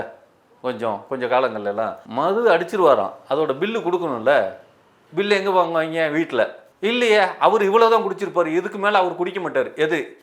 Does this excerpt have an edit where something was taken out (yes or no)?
yes